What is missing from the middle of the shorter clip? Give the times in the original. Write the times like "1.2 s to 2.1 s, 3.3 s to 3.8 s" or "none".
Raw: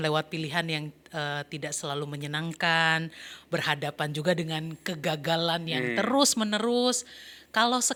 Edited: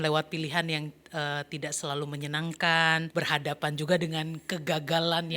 3.1 s to 3.4 s